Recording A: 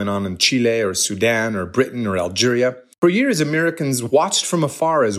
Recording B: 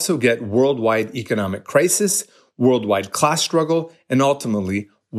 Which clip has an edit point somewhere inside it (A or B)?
A